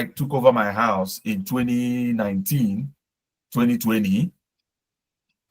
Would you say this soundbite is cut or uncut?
uncut